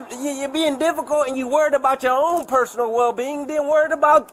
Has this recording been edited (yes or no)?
no